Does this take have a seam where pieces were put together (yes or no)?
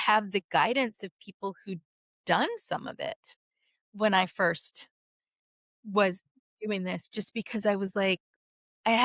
yes